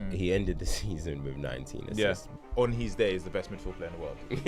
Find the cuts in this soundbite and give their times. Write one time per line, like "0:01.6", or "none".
0:02.3